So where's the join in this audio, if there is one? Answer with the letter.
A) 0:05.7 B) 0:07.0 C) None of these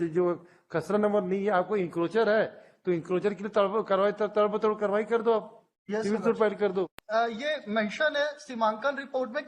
B